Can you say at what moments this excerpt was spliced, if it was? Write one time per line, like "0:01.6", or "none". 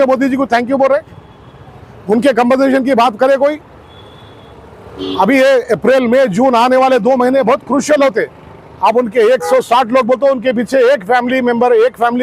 none